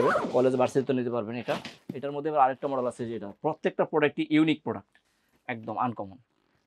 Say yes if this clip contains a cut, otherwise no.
no